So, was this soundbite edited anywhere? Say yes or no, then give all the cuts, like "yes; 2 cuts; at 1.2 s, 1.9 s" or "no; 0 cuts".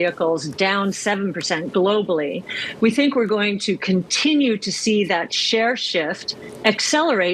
no; 0 cuts